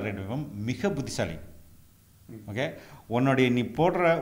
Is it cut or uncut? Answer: uncut